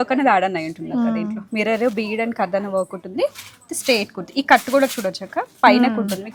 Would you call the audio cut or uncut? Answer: uncut